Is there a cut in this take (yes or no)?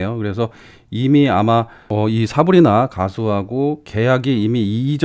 yes